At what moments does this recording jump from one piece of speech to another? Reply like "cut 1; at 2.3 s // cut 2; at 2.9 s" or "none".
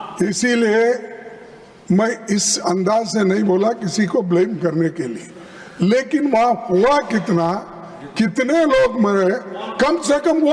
none